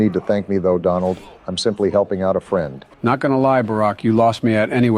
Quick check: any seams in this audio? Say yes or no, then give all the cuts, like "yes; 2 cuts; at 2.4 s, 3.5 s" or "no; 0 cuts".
yes; 1 cut; at 2.8 s